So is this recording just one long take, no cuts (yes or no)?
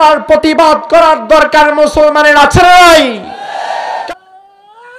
no